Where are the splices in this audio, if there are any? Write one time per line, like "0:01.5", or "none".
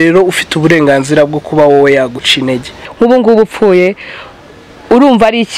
0:02.8